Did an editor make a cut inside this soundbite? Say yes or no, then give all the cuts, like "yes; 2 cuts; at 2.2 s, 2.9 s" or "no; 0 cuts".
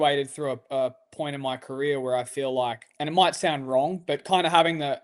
yes; 1 cut; at 2.9 s